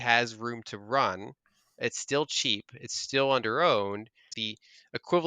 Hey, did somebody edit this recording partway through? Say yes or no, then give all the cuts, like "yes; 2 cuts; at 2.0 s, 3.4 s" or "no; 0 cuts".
yes; 1 cut; at 4.3 s